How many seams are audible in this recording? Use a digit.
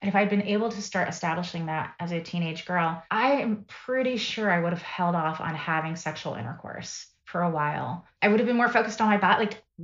2